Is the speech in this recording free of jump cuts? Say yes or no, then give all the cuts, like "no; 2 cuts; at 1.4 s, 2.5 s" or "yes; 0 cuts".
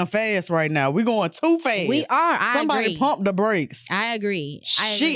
yes; 0 cuts